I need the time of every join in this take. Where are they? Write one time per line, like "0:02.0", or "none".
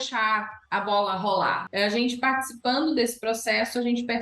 0:01.7